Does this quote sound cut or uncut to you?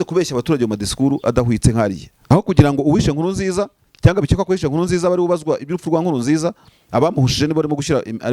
cut